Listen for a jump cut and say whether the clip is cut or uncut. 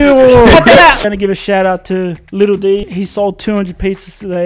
cut